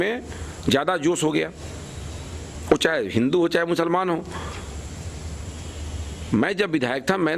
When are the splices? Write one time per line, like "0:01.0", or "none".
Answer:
none